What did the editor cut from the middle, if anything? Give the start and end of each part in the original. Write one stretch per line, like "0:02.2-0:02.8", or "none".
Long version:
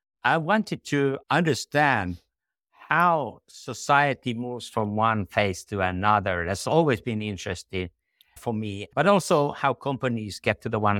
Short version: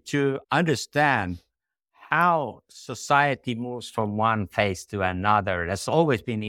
none